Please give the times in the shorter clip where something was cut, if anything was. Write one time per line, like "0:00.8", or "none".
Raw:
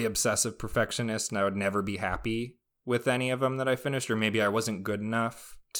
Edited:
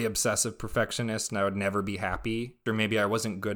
0:02.6